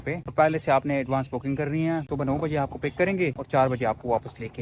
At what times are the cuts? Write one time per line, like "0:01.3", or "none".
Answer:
0:02.0